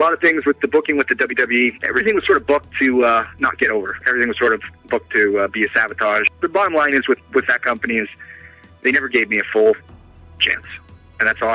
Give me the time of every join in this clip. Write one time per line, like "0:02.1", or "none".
0:01.8
0:04.0